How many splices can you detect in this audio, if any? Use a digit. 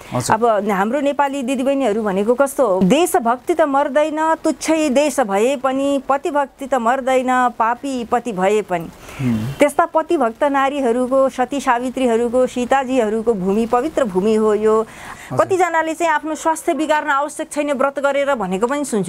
2